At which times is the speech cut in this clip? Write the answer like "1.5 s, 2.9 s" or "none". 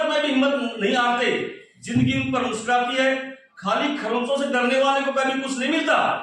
none

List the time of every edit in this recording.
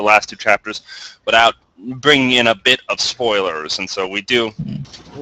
none

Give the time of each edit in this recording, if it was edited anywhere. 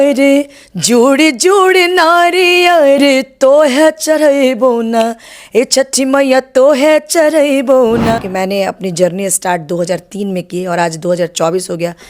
8.2 s

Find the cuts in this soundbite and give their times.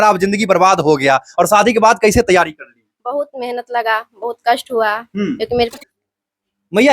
5.7 s

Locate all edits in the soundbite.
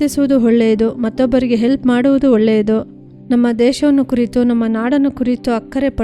none

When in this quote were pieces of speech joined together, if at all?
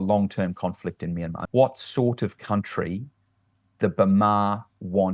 1.3 s

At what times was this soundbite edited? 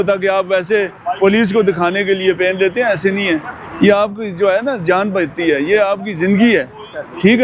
none

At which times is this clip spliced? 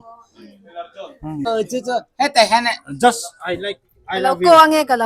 1.5 s

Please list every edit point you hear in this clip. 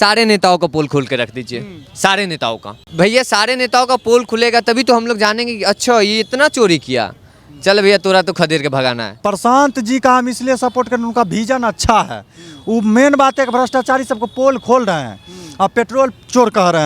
2.8 s, 9.2 s

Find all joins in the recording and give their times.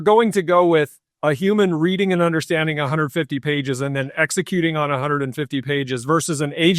1.0 s

